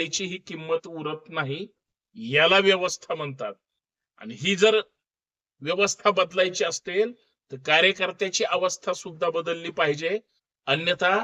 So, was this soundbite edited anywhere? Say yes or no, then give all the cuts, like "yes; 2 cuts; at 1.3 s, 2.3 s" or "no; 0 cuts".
no; 0 cuts